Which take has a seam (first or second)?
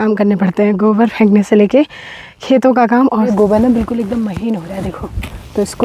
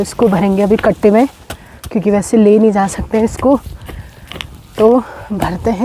first